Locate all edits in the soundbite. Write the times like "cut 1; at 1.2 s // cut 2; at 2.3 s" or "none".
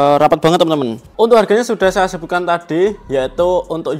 cut 1; at 1.0 s